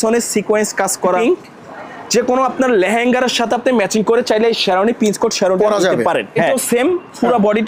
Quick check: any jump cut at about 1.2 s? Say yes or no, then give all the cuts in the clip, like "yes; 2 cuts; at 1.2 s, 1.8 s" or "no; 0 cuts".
yes; 2 cuts; at 1.2 s, 6.5 s